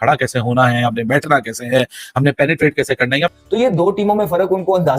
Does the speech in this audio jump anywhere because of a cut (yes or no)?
yes